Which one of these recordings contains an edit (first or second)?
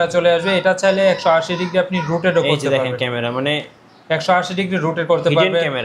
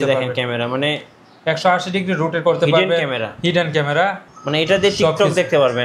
second